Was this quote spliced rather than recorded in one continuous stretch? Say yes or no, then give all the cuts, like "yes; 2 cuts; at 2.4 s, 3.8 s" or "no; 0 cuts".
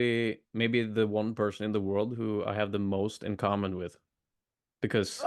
no; 0 cuts